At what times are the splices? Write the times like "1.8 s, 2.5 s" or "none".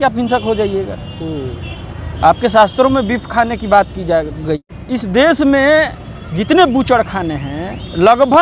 4.7 s